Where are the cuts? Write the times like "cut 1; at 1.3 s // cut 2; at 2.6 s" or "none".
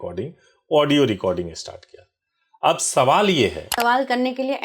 cut 1; at 3.7 s